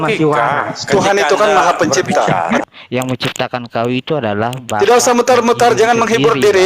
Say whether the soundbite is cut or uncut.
cut